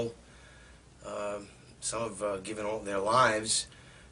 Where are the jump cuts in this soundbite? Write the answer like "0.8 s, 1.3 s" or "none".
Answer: 2.1 s